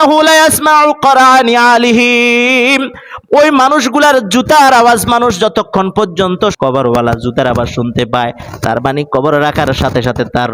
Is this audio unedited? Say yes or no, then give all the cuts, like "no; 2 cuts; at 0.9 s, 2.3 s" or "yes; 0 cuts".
no; 1 cut; at 6.5 s